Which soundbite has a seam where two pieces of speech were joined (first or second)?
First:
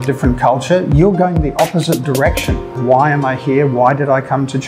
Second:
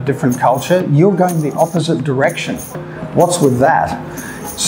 first